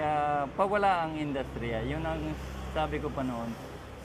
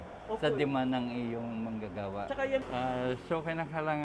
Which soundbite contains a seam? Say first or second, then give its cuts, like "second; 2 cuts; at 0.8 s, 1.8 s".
second; 1 cut; at 2.7 s